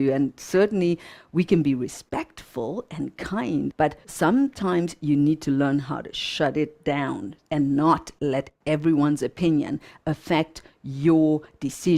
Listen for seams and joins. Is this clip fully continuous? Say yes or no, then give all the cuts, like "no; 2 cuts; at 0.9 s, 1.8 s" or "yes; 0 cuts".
no; 1 cut; at 3.8 s